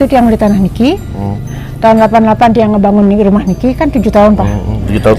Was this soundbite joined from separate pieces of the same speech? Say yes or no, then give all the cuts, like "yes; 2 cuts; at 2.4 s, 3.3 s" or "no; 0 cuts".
no; 0 cuts